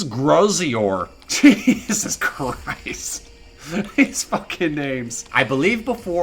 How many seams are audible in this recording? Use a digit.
1